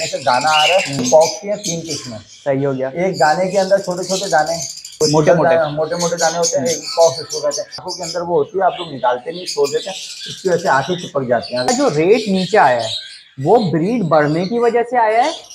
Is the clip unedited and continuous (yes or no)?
no